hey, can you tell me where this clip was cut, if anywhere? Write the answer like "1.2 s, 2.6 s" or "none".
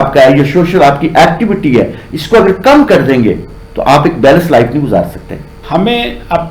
5.6 s